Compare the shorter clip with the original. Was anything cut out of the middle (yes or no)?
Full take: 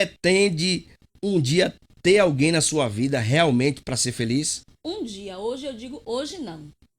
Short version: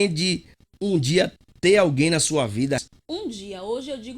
yes